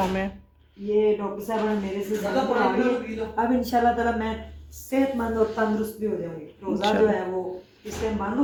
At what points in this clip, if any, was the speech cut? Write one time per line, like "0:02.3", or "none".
none